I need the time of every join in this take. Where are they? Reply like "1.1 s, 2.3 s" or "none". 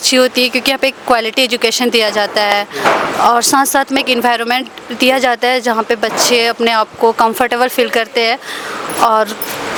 none

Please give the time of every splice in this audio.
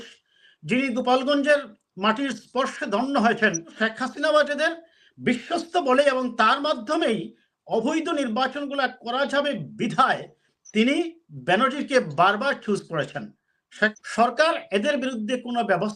3.7 s, 14.0 s

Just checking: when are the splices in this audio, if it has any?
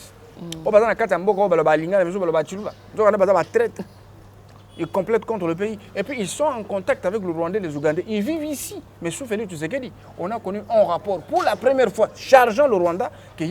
none

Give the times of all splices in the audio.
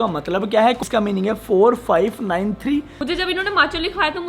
0.8 s, 3.0 s

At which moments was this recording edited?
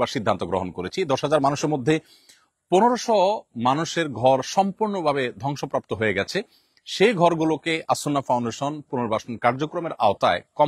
none

